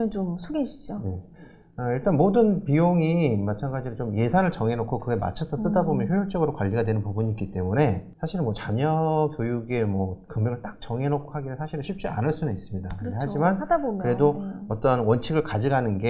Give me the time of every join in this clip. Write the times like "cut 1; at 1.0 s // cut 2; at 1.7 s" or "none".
none

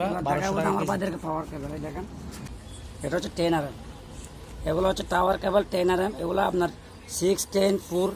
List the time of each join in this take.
cut 1; at 2.5 s

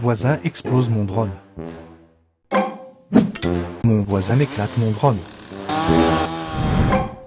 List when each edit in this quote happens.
none

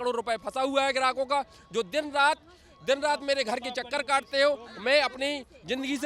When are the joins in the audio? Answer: none

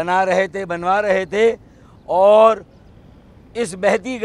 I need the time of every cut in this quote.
none

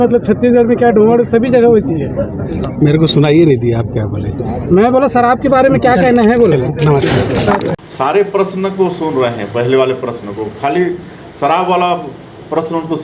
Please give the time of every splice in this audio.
cut 1; at 7.7 s

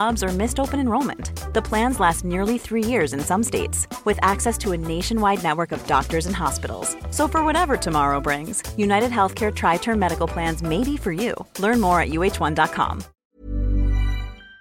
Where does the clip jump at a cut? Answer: cut 1; at 13.1 s

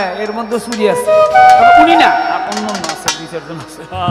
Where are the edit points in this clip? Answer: none

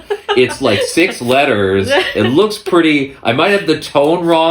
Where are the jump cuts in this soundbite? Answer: none

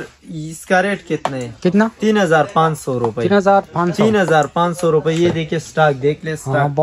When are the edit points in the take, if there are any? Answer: none

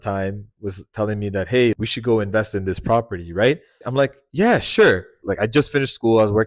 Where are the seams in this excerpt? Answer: cut 1; at 1.8 s // cut 2; at 3.7 s // cut 3; at 5.2 s

